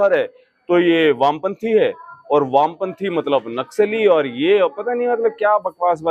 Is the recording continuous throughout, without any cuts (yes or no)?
yes